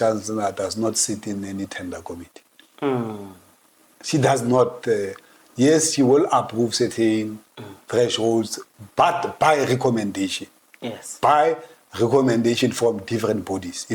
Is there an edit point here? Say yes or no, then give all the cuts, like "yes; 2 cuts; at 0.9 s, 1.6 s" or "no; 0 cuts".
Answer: no; 0 cuts